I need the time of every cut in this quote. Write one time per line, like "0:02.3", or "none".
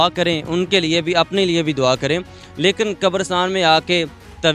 none